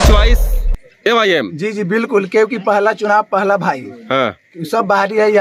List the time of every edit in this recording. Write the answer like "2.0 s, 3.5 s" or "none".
none